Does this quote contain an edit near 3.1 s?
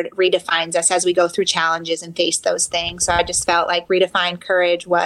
no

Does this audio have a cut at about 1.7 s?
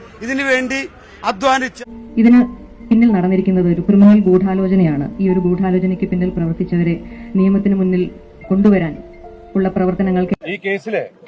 yes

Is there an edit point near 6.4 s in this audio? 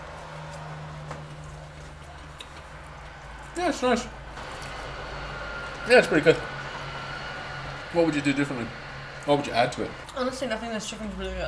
no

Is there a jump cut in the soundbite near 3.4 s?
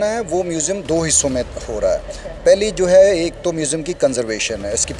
no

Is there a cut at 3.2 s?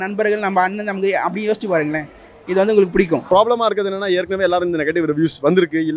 yes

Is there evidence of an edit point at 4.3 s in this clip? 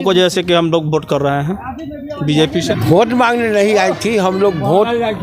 no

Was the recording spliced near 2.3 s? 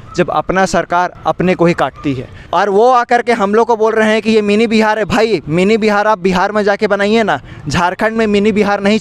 yes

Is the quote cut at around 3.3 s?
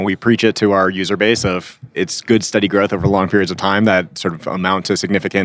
no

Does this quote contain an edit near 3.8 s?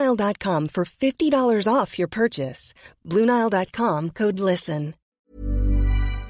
no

